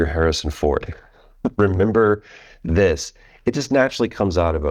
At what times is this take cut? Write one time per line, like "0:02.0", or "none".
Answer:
none